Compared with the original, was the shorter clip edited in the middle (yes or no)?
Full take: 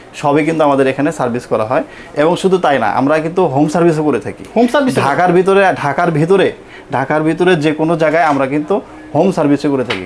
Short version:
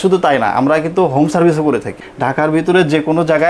yes